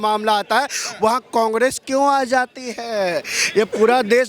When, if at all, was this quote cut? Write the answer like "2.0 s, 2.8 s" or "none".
none